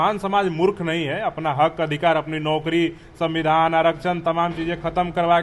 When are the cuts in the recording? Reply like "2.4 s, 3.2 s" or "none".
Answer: none